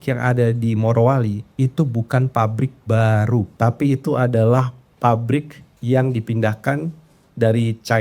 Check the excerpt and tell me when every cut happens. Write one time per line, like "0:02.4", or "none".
0:01.5
0:03.5